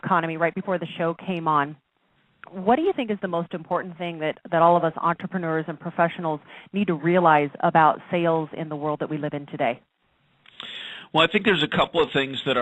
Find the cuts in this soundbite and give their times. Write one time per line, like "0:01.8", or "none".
0:10.2